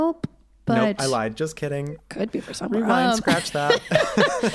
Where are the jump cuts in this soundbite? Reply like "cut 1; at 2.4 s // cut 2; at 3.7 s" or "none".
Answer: none